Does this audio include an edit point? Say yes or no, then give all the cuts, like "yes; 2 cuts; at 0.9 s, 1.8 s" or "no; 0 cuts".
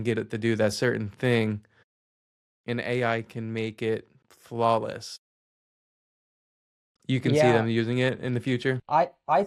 no; 0 cuts